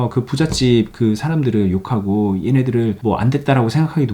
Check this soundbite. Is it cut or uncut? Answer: cut